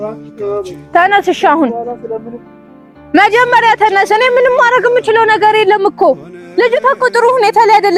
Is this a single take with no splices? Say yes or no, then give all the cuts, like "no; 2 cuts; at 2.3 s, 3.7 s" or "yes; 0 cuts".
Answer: yes; 0 cuts